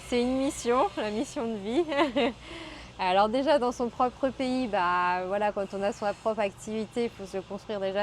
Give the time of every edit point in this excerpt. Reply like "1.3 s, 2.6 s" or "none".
none